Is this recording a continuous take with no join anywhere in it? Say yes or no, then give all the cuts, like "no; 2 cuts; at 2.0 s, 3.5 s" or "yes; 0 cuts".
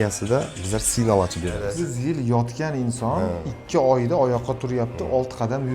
no; 1 cut; at 1.6 s